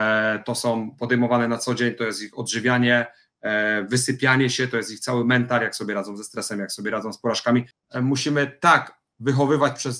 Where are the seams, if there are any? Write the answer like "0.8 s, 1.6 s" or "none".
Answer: 7.8 s